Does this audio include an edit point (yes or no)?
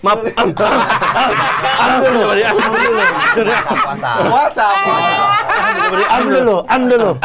no